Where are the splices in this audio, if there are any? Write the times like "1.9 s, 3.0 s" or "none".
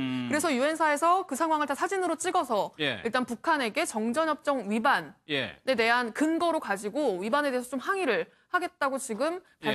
8.4 s